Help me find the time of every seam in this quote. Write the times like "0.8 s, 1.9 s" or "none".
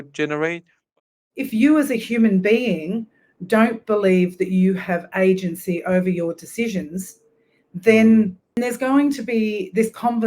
1.0 s, 8.5 s